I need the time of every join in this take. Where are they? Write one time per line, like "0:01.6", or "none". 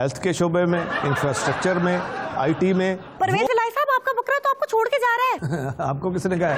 0:05.4